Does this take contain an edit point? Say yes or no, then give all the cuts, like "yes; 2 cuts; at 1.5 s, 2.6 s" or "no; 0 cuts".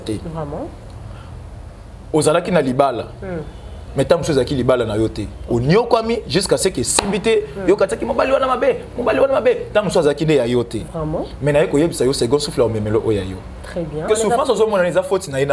yes; 1 cut; at 14.0 s